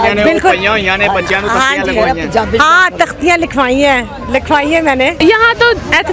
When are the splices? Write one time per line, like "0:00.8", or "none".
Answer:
0:05.2